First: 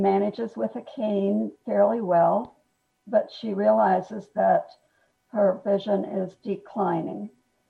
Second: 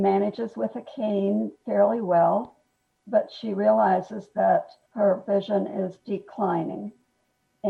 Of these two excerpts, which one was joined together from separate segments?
second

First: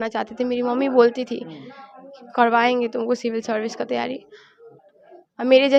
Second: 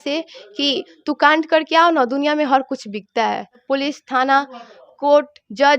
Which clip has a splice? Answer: second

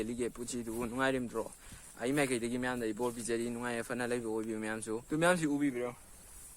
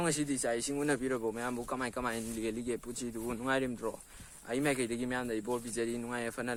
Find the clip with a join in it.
first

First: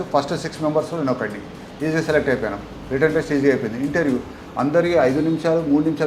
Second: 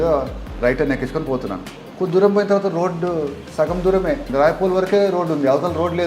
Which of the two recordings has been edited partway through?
second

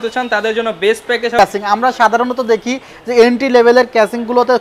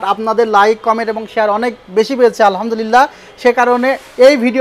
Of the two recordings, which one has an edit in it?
first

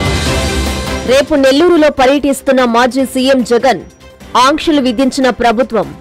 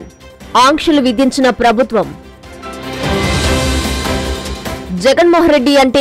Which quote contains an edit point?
first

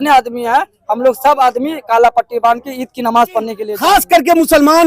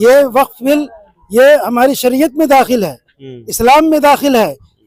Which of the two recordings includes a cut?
first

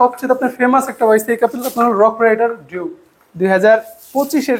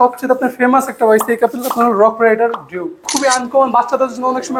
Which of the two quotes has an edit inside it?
second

